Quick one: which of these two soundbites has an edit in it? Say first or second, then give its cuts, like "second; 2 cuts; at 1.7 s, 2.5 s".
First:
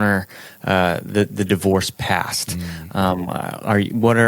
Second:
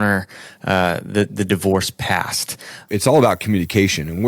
second; 1 cut; at 2.8 s